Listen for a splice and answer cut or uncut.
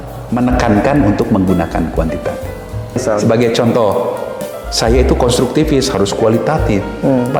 cut